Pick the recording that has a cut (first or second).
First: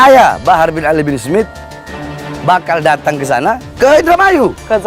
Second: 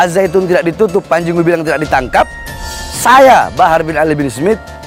first